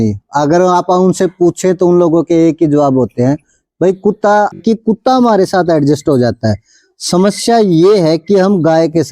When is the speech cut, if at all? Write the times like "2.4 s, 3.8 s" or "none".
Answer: 4.6 s